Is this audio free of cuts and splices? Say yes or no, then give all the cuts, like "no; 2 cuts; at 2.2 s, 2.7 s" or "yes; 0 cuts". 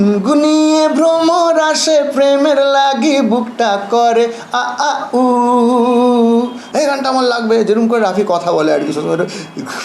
no; 1 cut; at 6.6 s